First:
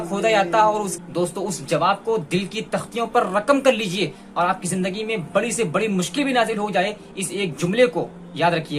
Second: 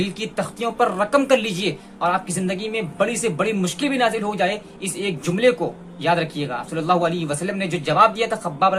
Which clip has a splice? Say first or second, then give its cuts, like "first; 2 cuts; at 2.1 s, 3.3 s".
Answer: first; 1 cut; at 0.9 s